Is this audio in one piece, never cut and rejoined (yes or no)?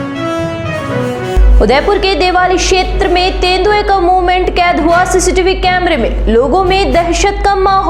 no